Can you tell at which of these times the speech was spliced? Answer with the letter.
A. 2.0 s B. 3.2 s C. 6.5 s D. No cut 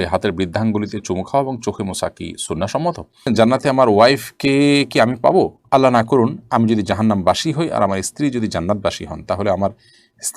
B